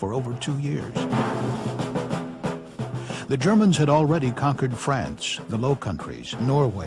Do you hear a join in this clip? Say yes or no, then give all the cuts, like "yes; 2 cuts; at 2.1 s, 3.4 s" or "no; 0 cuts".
no; 0 cuts